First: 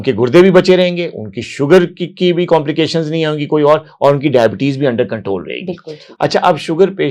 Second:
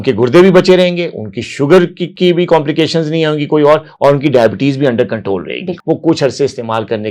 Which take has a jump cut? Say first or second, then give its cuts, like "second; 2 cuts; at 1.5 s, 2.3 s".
second; 1 cut; at 5.7 s